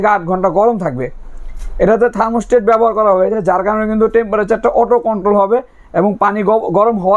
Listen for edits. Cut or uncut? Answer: uncut